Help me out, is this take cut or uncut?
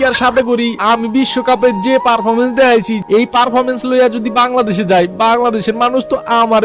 cut